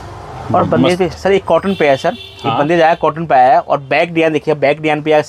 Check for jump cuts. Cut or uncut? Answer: uncut